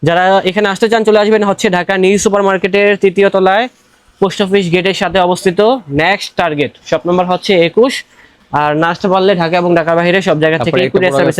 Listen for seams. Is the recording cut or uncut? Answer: uncut